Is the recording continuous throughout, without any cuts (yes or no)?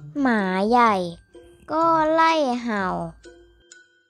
yes